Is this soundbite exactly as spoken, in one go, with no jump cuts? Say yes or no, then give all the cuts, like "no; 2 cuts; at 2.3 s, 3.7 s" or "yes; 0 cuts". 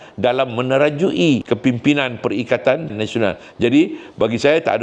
no; 1 cut; at 1.4 s